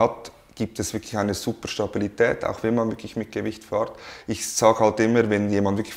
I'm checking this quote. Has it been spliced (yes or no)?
no